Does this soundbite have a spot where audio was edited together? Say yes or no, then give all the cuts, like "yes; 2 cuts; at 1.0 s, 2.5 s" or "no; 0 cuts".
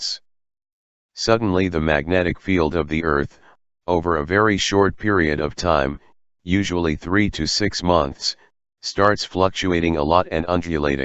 yes; 1 cut; at 3.6 s